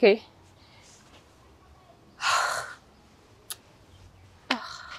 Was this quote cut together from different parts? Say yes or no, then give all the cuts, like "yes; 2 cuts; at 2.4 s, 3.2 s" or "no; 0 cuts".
no; 0 cuts